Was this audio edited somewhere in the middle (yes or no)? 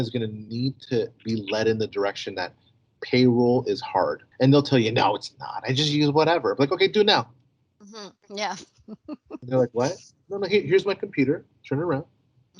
yes